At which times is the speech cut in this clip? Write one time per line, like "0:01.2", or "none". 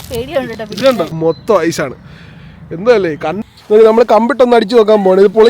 0:01.1
0:03.4